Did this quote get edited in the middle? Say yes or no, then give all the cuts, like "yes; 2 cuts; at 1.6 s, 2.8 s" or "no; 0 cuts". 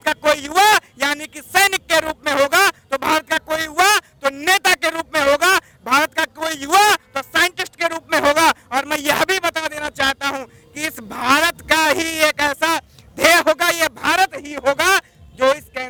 no; 0 cuts